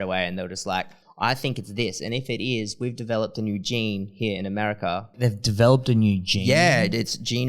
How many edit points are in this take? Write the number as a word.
two